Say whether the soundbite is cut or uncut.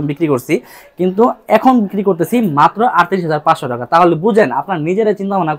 uncut